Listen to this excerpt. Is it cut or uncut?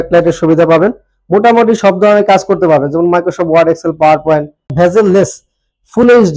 cut